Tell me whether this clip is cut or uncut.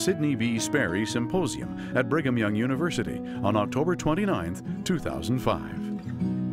cut